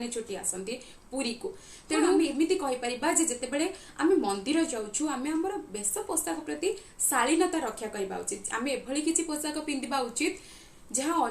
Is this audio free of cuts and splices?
no; 1 cut; at 2.2 s

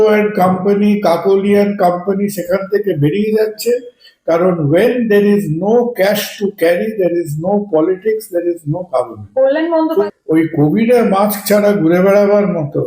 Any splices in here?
yes; 1 cut; at 9.8 s

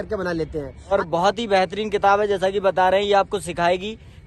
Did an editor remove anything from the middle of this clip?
yes; 1 cut; at 0.9 s

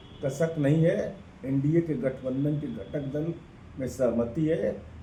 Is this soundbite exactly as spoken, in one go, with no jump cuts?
yes; 0 cuts

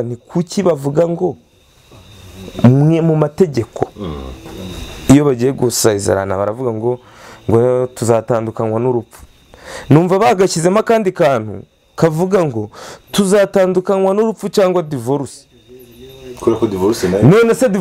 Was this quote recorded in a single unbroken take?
yes; 0 cuts

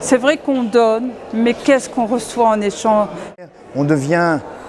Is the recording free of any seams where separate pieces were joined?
no; 1 cut; at 3.4 s

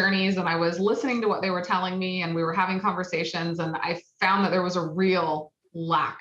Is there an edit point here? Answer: no; 0 cuts

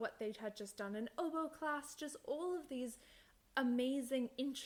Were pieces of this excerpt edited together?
no; 0 cuts

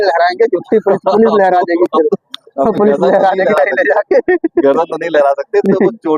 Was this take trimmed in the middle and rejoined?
no; 0 cuts

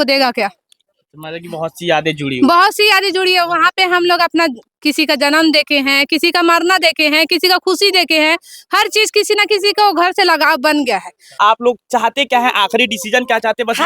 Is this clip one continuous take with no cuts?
no; 1 cut; at 11.4 s

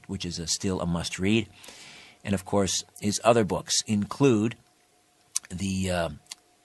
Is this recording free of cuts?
yes; 0 cuts

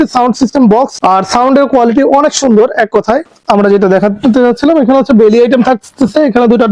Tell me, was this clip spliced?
yes; 1 cut; at 3.3 s

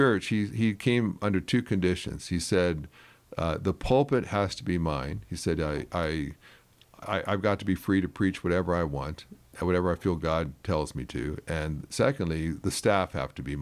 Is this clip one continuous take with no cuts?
yes; 0 cuts

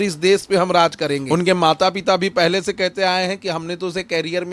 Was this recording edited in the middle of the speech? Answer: yes; 1 cut; at 1.2 s

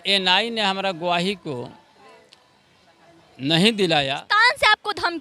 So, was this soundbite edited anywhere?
yes; 1 cut; at 4.2 s

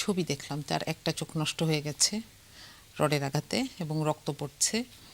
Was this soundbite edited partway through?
no; 0 cuts

